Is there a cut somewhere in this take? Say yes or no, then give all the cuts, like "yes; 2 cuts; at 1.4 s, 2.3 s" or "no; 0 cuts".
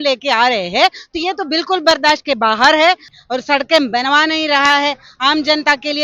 yes; 1 cut; at 3.1 s